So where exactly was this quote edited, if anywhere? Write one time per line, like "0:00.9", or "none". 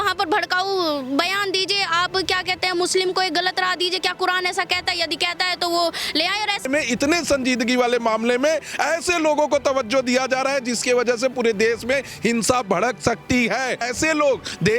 0:06.7
0:13.9